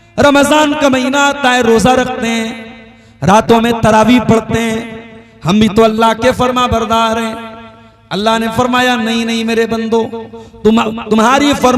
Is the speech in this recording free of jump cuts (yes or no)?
yes